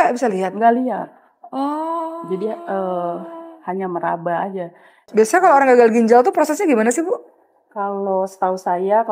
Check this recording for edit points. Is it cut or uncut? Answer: cut